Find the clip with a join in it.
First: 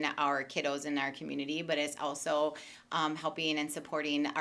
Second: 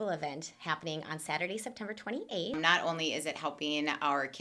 second; 1 cut; at 2.5 s

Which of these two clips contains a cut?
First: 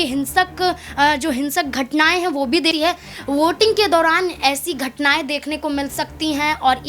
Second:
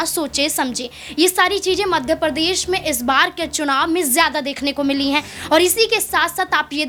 first; 1 cut; at 2.7 s

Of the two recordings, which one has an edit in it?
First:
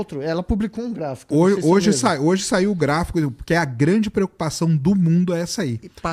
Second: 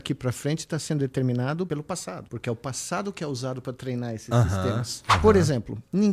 second; 2 cuts; at 1.9 s, 5.0 s

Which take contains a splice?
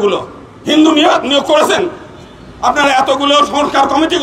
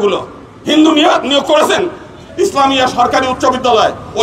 second; 1 cut; at 2.2 s

